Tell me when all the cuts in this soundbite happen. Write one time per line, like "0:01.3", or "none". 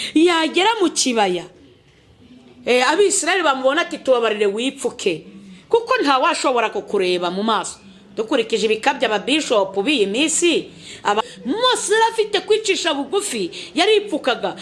0:11.2

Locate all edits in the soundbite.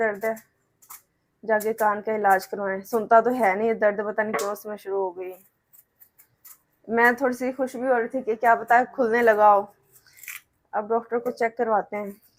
none

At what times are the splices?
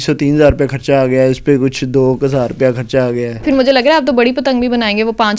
0:03.4

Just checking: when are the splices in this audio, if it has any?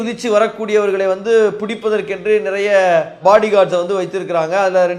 none

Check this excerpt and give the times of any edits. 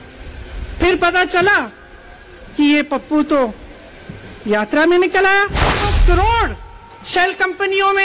0:05.8

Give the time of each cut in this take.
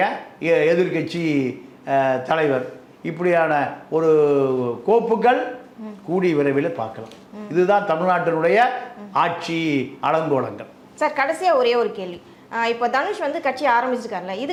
none

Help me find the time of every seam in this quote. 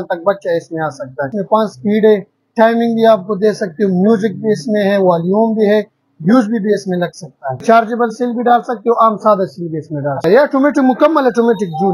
0:01.3
0:07.6
0:10.2

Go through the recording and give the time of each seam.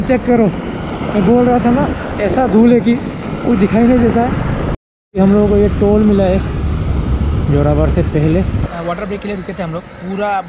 0:04.7
0:08.6

